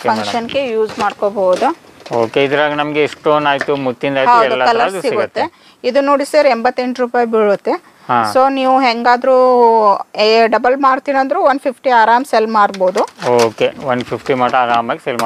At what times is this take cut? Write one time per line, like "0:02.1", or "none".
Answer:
none